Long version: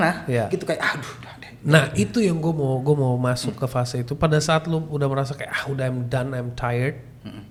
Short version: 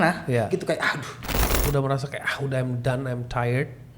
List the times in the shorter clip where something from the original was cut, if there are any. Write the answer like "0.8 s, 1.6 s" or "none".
1.6 s